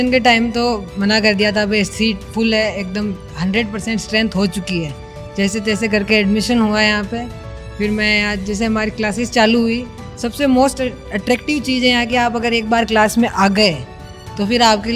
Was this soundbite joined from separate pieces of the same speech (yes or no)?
no